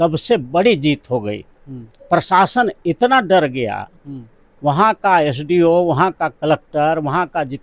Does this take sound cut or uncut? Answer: cut